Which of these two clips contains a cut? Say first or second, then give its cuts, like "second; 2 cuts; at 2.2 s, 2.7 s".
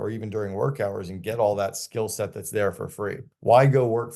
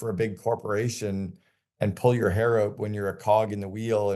first; 1 cut; at 3.2 s